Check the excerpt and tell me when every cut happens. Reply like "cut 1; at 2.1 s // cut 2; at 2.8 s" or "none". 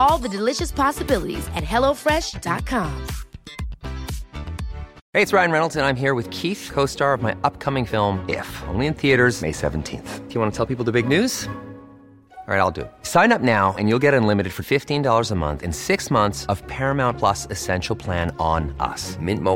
cut 1; at 4.9 s

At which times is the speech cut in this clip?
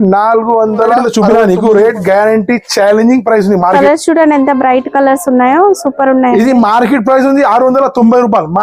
cut 1; at 1.1 s // cut 2; at 3.8 s

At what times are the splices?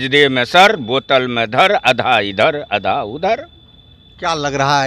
none

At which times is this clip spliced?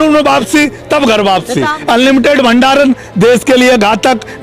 cut 1; at 1.8 s

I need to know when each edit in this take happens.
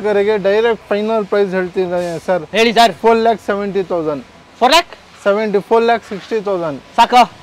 none

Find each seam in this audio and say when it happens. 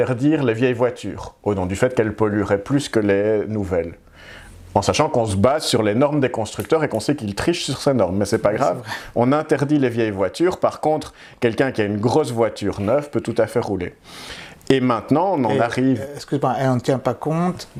none

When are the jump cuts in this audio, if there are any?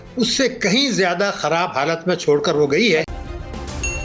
cut 1; at 3.1 s

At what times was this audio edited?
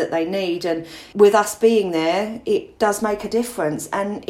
cut 1; at 1.0 s // cut 2; at 2.7 s

